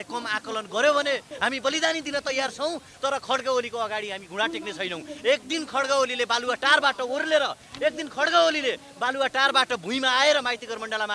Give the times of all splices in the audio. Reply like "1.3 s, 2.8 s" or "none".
1.3 s

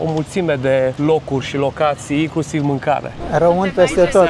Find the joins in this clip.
1.0 s, 3.2 s

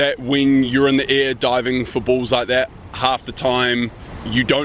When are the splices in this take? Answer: none

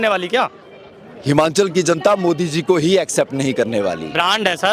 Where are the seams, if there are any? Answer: none

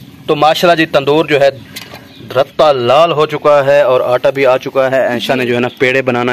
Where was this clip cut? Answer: none

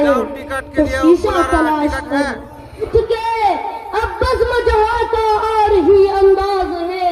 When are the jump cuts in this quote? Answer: 2.9 s

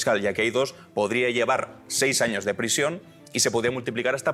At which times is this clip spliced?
none

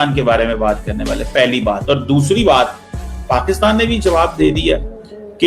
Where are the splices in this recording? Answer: none

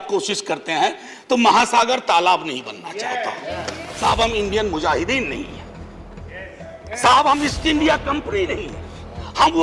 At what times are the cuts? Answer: 3.9 s

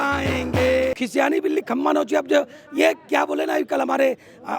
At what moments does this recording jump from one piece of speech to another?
0.9 s

